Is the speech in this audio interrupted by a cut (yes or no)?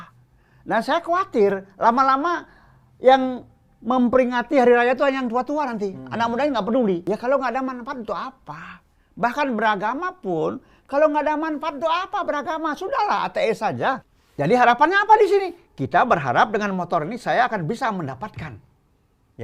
yes